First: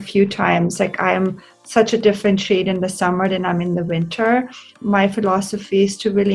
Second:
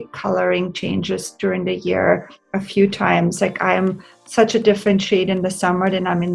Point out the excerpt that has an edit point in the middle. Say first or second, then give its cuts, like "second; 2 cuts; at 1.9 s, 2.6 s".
first; 1 cut; at 4.7 s